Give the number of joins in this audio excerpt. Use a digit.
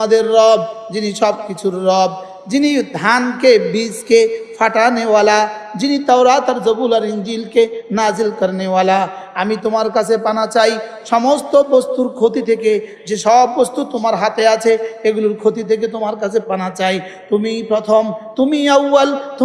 0